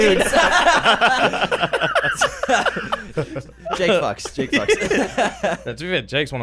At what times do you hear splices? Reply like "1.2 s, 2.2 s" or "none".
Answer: none